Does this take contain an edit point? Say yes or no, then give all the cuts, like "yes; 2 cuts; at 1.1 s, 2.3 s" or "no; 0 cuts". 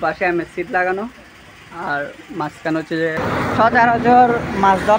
yes; 1 cut; at 3.2 s